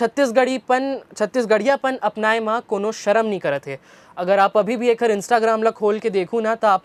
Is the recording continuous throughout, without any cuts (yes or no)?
yes